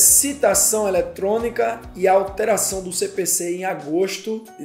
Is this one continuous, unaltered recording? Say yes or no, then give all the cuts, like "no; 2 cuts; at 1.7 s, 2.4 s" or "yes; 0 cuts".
yes; 0 cuts